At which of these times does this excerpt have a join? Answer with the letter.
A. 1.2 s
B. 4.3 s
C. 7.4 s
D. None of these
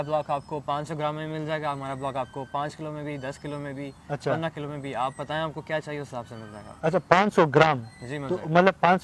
D